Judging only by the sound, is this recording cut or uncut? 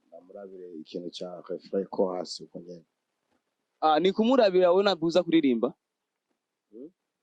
uncut